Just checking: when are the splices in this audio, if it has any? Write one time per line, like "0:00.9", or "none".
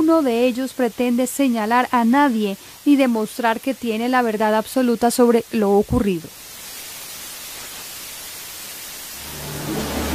none